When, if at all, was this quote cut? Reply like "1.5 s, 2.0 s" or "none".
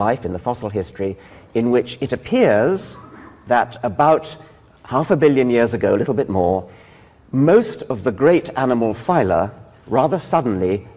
1.8 s